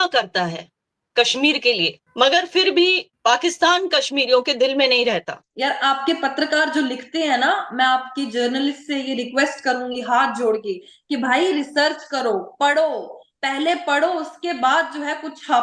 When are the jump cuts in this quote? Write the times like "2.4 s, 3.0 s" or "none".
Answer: 2.0 s, 3.1 s, 5.4 s